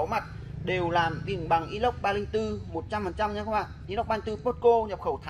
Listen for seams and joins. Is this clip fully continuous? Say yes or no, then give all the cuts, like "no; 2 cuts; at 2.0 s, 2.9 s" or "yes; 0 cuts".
yes; 0 cuts